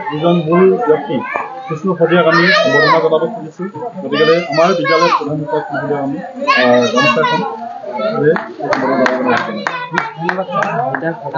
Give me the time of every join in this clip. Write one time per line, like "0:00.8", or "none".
none